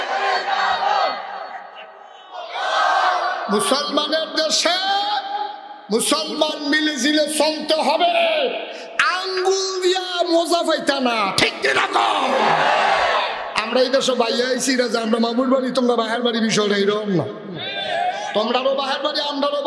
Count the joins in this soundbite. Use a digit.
0